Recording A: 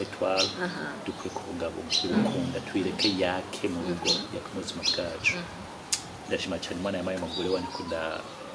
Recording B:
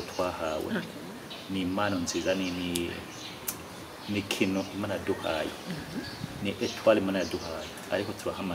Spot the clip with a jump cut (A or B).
B